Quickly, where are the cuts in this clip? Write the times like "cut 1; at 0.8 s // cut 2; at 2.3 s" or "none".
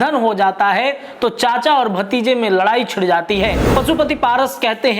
cut 1; at 3.6 s